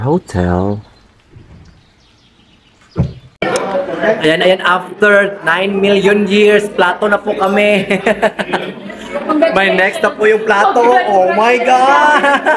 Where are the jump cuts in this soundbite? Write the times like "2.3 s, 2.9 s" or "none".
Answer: 3.3 s